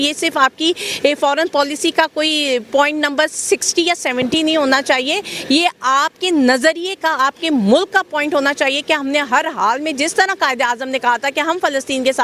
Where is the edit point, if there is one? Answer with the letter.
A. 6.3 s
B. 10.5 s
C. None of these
C